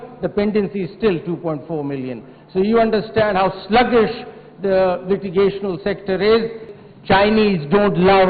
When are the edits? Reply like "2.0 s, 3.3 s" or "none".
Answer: 6.7 s